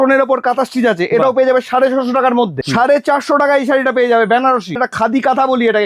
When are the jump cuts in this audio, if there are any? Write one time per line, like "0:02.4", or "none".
0:02.6
0:04.8